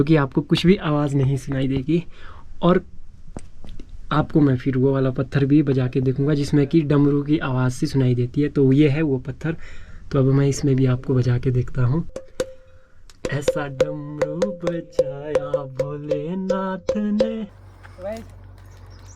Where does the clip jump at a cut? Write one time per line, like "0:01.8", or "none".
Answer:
0:12.1
0:17.5